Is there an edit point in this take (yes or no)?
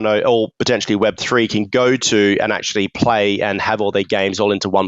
no